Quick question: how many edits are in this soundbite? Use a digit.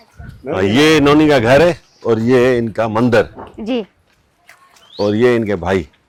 0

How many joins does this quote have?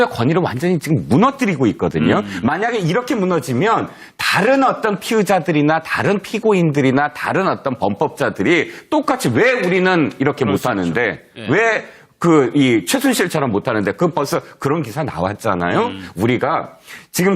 1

